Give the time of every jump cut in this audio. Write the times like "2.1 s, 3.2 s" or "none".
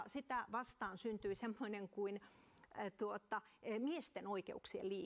4.1 s